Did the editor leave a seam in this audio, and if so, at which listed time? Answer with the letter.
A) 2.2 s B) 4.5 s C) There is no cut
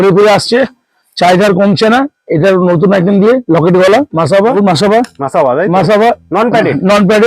B